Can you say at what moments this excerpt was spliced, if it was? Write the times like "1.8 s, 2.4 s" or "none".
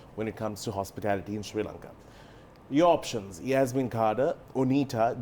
none

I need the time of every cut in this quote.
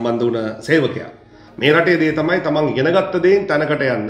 1.4 s

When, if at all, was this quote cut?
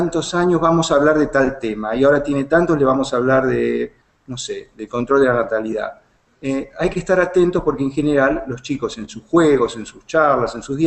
5.8 s

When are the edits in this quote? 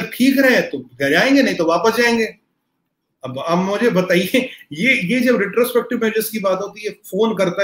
none

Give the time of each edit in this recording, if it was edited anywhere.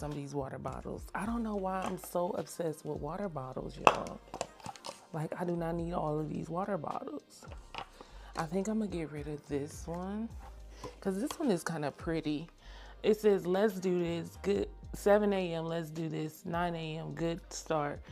none

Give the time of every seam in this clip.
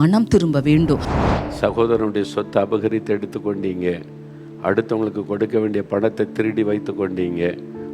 1.1 s

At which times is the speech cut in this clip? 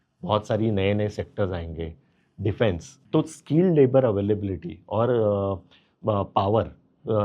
2.9 s

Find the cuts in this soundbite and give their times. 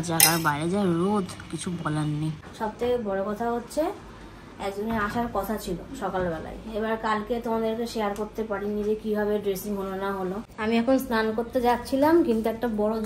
2.4 s, 10.5 s

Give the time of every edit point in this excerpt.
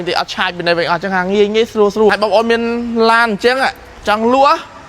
2.1 s

